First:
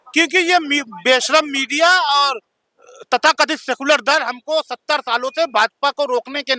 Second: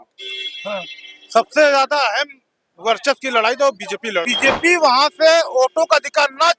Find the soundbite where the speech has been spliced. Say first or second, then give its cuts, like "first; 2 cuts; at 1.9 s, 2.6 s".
second; 1 cut; at 4.3 s